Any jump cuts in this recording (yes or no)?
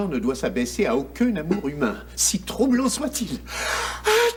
no